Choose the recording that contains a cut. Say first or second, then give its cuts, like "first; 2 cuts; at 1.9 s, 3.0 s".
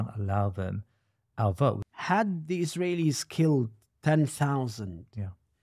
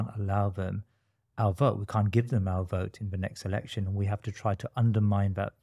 first; 1 cut; at 1.8 s